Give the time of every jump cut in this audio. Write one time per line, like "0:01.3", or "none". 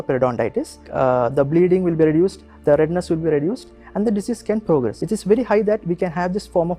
0:00.9
0:05.0